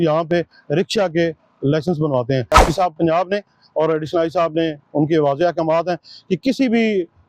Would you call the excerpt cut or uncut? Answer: cut